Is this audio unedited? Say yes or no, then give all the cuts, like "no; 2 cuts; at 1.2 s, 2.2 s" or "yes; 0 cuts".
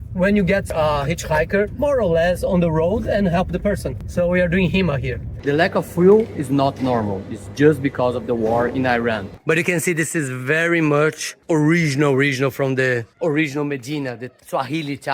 no; 2 cuts; at 5.3 s, 9.3 s